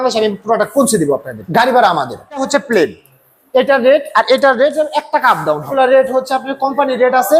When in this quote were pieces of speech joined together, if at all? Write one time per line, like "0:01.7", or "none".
0:01.4
0:02.5
0:05.7